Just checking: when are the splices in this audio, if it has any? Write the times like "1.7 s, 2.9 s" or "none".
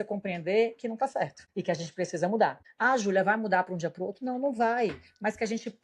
1.5 s, 2.7 s